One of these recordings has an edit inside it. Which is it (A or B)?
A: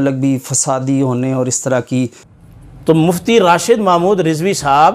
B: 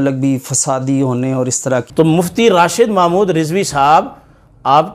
B